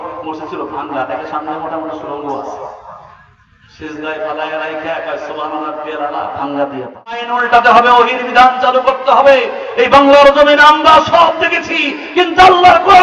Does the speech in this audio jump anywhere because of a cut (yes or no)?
yes